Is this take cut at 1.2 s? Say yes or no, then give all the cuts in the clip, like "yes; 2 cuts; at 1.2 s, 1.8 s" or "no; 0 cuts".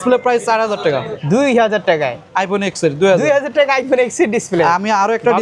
yes; 1 cut; at 1.2 s